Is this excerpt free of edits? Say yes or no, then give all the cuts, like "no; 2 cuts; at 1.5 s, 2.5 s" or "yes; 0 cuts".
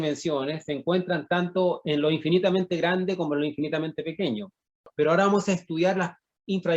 no; 1 cut; at 4.9 s